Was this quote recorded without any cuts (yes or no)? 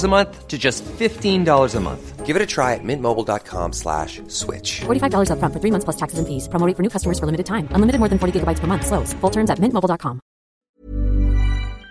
no